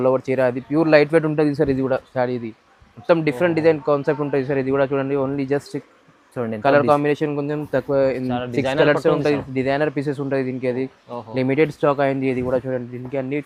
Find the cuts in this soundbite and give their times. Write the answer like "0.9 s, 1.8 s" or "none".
none